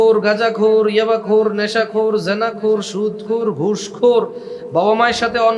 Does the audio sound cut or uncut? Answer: uncut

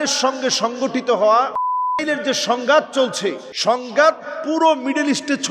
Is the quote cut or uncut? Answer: cut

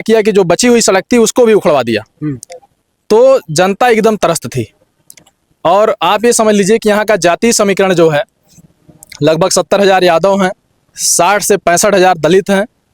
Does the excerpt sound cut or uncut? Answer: uncut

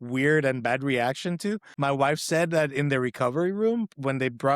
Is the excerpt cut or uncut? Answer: cut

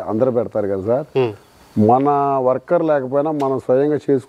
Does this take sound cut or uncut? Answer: uncut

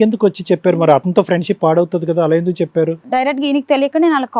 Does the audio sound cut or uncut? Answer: cut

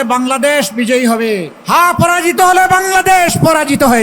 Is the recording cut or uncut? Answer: cut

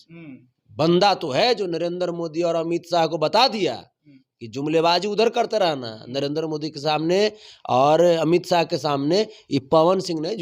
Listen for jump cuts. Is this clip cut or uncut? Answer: uncut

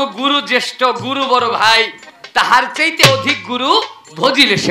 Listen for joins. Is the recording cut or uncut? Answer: uncut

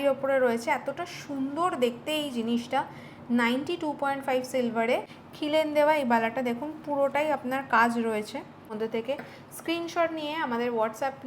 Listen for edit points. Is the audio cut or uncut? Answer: cut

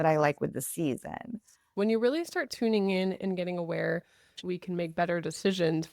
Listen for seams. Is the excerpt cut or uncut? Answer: cut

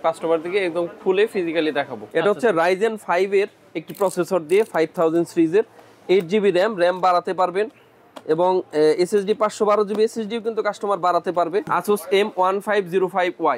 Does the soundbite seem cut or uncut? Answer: cut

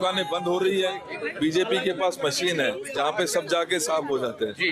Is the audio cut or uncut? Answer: cut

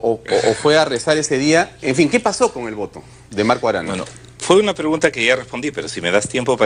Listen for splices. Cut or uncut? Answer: uncut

